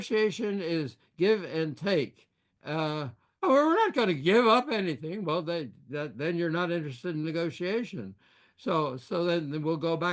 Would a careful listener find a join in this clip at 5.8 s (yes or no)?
no